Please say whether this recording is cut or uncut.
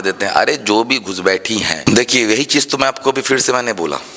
cut